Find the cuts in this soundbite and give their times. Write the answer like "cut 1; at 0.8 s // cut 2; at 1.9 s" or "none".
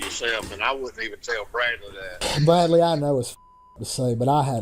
cut 1; at 2.2 s